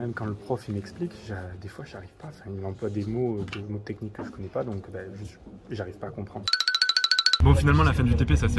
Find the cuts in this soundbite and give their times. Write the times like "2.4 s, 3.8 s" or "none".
none